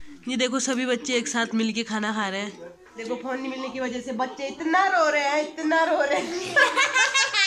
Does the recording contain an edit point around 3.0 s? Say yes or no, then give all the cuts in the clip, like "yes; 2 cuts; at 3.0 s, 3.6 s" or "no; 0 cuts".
yes; 1 cut; at 3.0 s